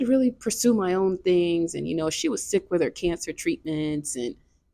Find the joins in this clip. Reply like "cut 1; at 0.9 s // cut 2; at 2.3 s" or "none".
none